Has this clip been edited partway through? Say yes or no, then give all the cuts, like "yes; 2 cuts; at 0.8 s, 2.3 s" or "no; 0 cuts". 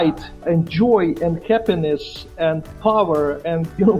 no; 0 cuts